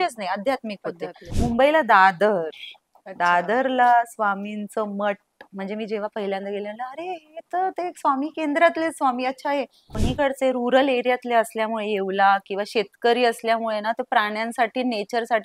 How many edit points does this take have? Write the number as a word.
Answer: two